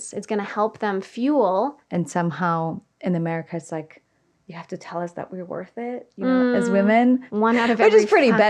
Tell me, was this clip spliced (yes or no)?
yes